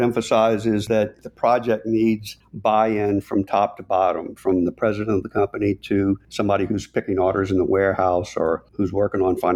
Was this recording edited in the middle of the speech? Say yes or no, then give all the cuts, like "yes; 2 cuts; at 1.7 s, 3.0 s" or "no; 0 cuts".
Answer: yes; 3 cuts; at 0.9 s, 6.3 s, 8.7 s